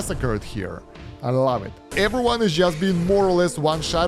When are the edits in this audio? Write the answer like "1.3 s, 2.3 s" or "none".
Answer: 1.8 s